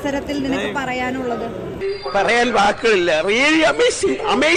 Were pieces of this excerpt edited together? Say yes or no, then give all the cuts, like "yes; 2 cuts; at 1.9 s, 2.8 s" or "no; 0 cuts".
no; 0 cuts